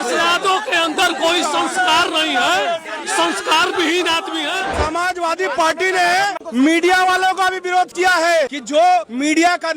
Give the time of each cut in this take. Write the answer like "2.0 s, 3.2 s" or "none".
4.8 s, 6.4 s, 8.6 s